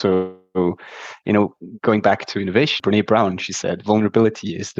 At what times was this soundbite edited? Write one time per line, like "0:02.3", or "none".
0:02.8